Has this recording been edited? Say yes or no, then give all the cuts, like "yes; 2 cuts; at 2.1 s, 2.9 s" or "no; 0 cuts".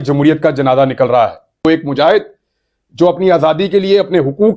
yes; 1 cut; at 1.6 s